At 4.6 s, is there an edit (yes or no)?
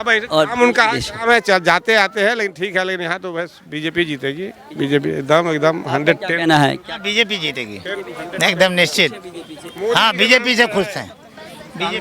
no